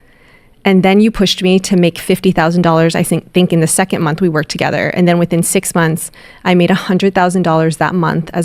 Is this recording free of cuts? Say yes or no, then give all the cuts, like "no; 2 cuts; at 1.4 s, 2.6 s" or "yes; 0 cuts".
yes; 0 cuts